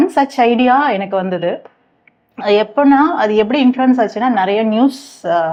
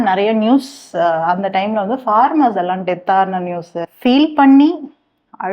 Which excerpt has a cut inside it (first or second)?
second